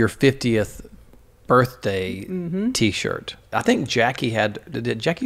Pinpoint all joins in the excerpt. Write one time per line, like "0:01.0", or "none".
0:03.6